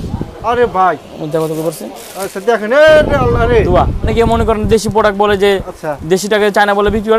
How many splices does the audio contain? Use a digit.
1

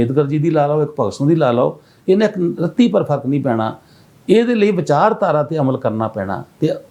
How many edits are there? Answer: 0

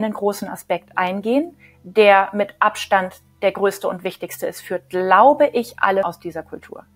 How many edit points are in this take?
1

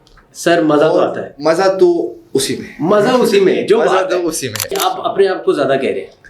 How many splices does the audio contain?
1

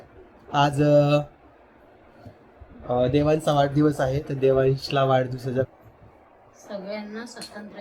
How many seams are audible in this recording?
1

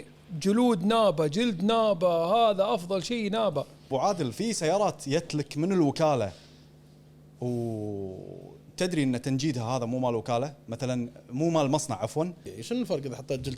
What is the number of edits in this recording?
2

